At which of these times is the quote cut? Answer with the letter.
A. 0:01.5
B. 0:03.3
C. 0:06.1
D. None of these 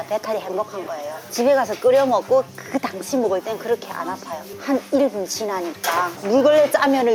C